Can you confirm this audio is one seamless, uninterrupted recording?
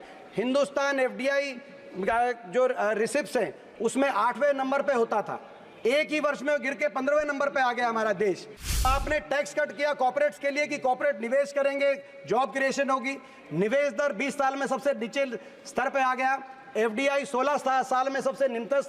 no; 1 cut; at 8.9 s

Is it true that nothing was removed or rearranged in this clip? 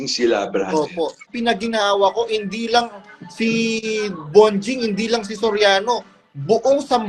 no; 1 cut; at 1.3 s

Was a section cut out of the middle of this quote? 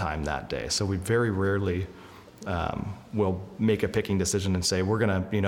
no; 0 cuts

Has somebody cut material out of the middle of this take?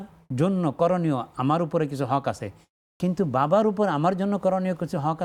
no; 0 cuts

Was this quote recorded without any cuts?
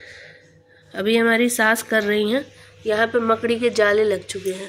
yes; 0 cuts

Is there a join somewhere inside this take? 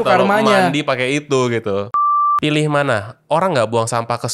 yes; 1 cut; at 2.0 s

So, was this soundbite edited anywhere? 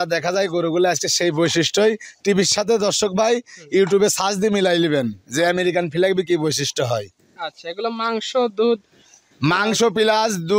no; 0 cuts

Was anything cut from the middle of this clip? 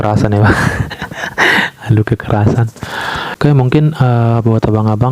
yes; 1 cut; at 3.3 s

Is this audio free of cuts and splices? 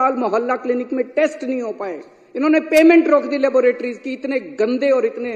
yes; 0 cuts

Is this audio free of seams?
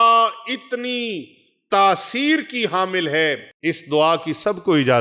no; 1 cut; at 3.5 s

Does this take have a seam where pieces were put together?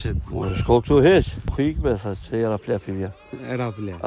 yes; 1 cut; at 1.5 s

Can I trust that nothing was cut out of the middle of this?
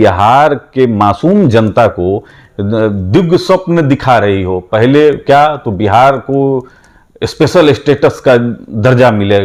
yes; 0 cuts

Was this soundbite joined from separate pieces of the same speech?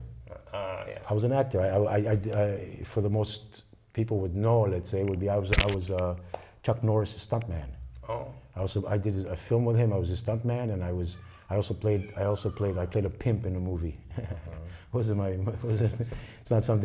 no; 0 cuts

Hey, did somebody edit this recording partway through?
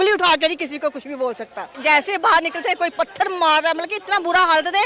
yes; 1 cut; at 1.7 s

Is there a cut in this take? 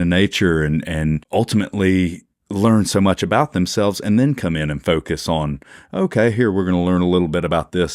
yes; 1 cut; at 1.2 s

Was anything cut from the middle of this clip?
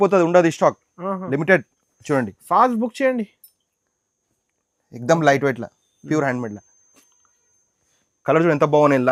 no; 0 cuts

